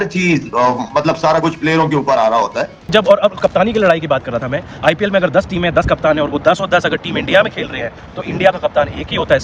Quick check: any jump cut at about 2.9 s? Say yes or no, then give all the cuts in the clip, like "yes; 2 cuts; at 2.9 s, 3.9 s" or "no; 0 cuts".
yes; 1 cut; at 2.9 s